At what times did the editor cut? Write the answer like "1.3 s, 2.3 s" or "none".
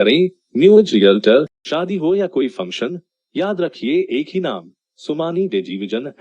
1.6 s